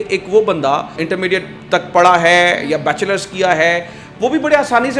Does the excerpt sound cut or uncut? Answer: cut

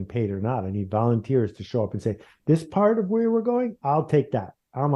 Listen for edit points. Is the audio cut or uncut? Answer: uncut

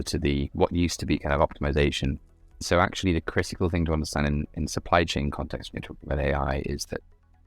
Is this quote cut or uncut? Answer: cut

